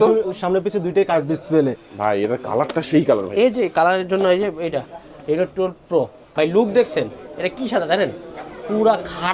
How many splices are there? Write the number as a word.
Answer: two